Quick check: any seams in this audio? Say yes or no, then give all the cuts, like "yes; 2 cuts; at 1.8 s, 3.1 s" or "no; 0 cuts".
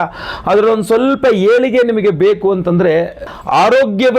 yes; 1 cut; at 3.3 s